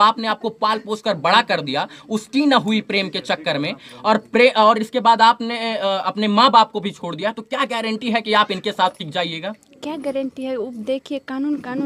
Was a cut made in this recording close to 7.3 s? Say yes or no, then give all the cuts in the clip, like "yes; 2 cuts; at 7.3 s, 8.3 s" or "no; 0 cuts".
no; 0 cuts